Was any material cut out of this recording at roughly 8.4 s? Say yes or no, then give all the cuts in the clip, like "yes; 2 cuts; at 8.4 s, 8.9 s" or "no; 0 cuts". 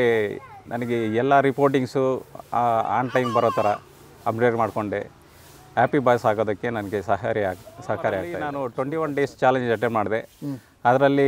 yes; 1 cut; at 8.4 s